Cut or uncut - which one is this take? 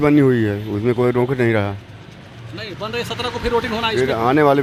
uncut